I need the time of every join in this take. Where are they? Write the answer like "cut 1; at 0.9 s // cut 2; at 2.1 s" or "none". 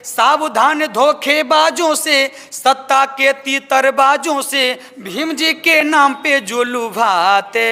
none